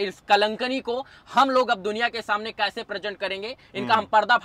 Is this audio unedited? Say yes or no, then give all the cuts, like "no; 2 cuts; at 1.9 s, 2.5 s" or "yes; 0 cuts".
yes; 0 cuts